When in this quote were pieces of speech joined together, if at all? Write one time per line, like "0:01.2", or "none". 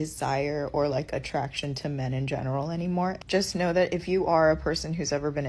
0:03.0